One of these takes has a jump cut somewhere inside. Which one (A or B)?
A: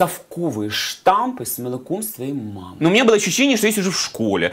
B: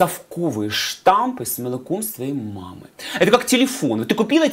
A